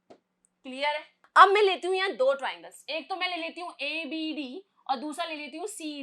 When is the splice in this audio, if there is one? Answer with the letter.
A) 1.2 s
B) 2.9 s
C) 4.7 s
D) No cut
A